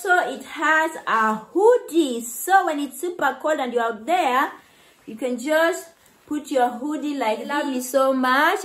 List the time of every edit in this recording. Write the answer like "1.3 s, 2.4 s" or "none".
7.6 s